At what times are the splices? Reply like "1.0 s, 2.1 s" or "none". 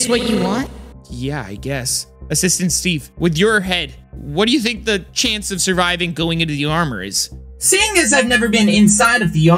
3.1 s, 7.5 s